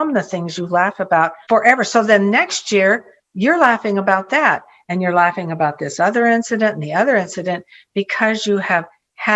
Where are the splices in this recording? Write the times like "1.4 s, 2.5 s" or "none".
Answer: 1.4 s